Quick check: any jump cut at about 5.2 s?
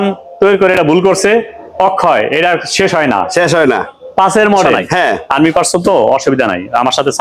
yes; 1 cut; at 5.2 s

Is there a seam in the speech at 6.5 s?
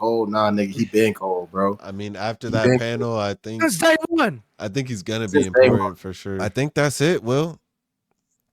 yes; 1 cut; at 6.5 s

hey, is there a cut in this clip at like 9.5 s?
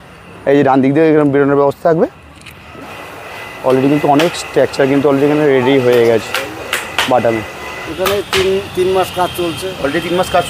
no; 2 cuts; at 2.9 s, 7.8 s

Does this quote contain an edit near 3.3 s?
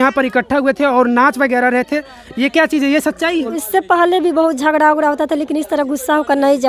yes; 1 cut; at 3.3 s

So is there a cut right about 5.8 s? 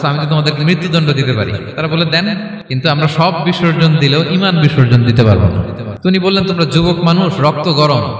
yes; 2 cuts; at 2.6 s, 5.8 s

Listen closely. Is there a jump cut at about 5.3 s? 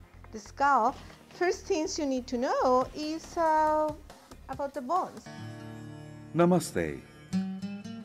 yes; 1 cut; at 5.3 s

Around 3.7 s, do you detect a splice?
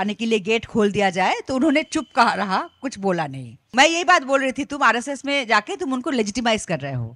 yes; 1 cut; at 3.7 s

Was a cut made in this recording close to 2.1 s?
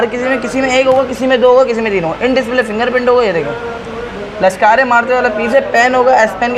no; 0 cuts

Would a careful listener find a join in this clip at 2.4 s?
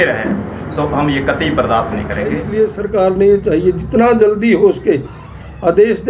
yes; 1 cut; at 2.4 s

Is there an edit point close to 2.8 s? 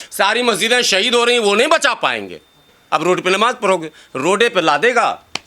yes; 1 cut; at 2.8 s

